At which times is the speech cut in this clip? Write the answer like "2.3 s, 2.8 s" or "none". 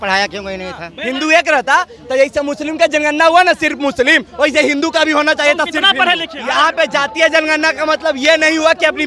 0.9 s, 6.3 s